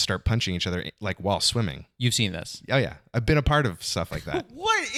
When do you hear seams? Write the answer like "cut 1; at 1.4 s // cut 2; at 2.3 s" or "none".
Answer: none